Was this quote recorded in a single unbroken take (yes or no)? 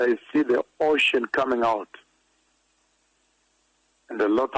yes